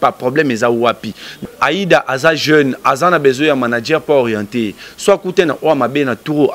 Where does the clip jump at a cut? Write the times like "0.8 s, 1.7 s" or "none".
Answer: 1.3 s